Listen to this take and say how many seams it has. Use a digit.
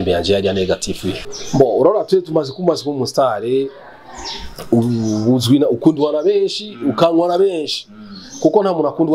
1